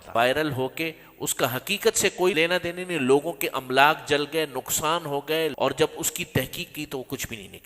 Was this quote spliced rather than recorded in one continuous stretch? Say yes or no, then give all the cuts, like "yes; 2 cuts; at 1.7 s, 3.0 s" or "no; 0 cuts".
yes; 2 cuts; at 2.3 s, 5.5 s